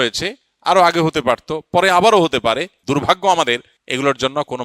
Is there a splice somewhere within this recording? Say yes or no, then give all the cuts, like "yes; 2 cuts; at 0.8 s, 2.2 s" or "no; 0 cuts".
yes; 2 cuts; at 2.7 s, 3.8 s